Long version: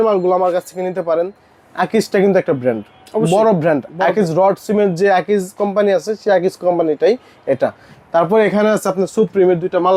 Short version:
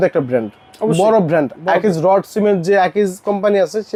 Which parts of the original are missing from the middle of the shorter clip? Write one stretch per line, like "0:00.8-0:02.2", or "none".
none